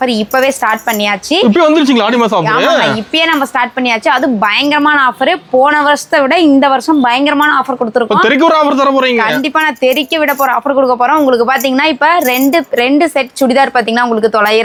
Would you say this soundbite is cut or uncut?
uncut